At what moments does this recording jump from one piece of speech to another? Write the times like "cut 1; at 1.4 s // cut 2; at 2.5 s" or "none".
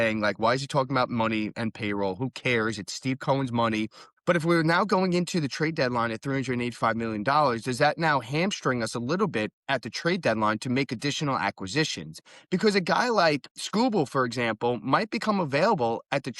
cut 1; at 4.1 s // cut 2; at 12.2 s